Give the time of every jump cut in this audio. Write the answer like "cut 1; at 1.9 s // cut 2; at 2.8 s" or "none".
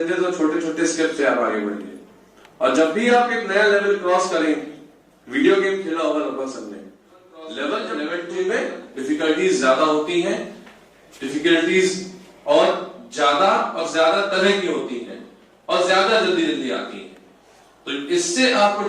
cut 1; at 7.9 s